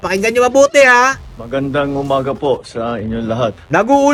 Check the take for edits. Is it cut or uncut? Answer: uncut